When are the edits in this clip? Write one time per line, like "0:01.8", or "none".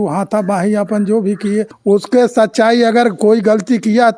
0:01.7